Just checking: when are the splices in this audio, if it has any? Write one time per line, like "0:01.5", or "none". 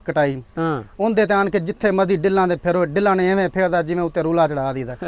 none